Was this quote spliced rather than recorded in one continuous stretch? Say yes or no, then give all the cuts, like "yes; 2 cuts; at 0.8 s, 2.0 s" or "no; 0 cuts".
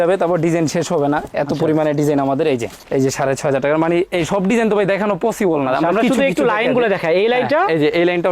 yes; 1 cut; at 2.8 s